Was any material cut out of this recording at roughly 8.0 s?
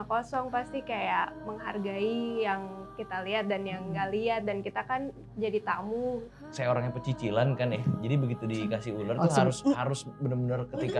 no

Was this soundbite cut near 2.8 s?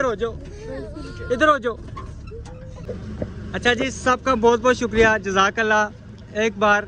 yes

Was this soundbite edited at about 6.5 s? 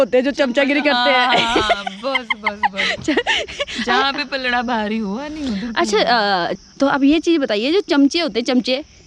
yes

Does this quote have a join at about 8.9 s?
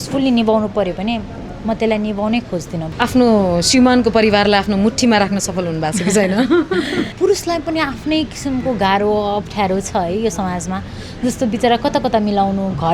no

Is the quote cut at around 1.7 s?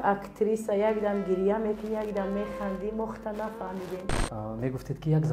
no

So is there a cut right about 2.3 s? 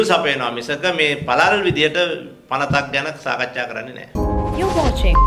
no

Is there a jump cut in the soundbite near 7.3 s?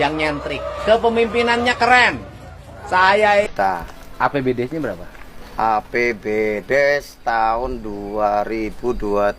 no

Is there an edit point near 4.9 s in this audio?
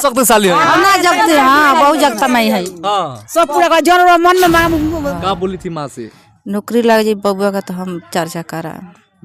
yes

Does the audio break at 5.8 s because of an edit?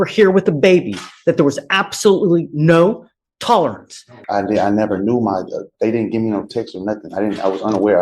no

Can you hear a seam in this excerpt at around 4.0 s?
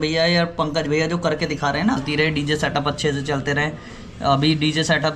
no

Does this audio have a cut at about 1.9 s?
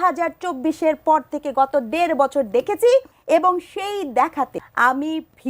no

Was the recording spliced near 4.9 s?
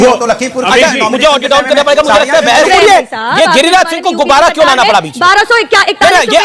no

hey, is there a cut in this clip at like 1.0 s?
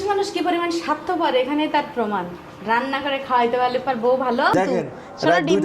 no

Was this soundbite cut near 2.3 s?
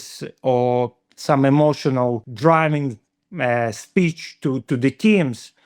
yes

